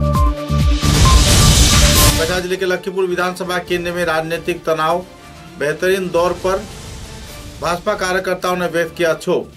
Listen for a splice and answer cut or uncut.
uncut